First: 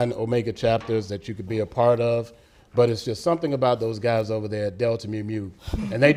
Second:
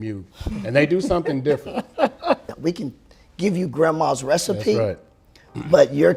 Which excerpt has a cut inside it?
second; 1 cut; at 2.5 s

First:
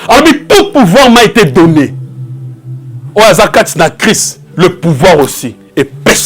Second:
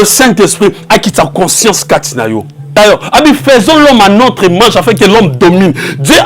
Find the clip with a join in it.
second; 1 cut; at 2.8 s

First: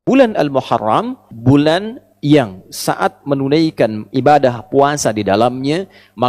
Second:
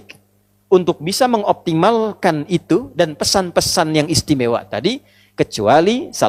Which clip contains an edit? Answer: first; 1 cut; at 1.3 s

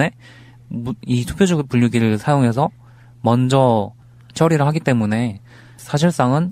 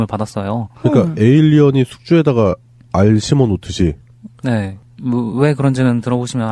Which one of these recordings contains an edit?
first; 1 cut; at 4.3 s

